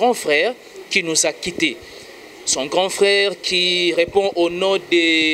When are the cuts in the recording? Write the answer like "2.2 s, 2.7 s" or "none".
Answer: none